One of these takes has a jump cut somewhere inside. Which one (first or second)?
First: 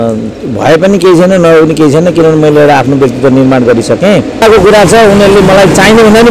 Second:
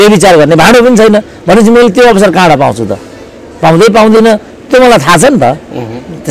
first